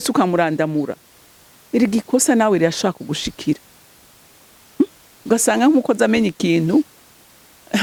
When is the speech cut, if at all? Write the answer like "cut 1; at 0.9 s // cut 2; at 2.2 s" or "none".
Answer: none